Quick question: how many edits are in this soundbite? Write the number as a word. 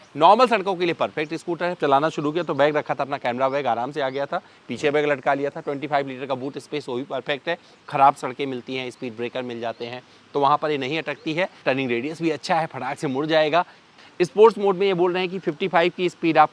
four